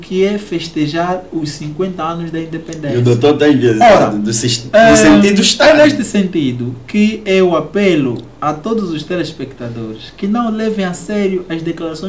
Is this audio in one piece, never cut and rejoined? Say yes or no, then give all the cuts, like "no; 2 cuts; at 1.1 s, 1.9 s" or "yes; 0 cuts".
yes; 0 cuts